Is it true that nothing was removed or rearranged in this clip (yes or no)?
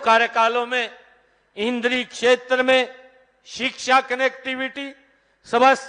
yes